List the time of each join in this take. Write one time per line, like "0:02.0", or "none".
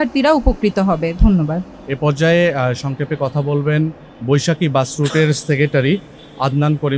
none